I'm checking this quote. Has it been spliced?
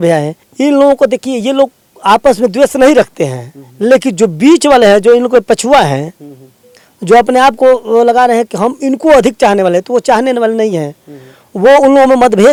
no; 0 cuts

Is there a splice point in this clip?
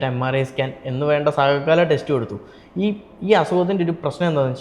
no; 0 cuts

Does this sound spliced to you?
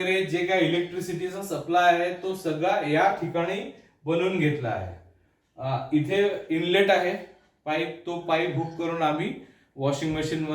no; 0 cuts

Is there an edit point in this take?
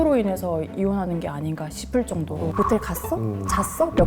yes; 1 cut; at 2.5 s

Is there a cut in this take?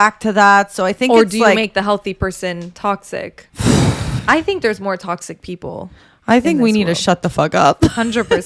yes; 1 cut; at 3.4 s

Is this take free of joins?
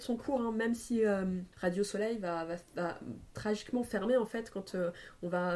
no; 1 cut; at 1.5 s

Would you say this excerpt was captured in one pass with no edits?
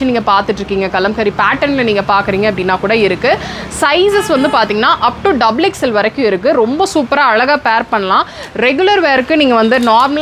yes; 0 cuts

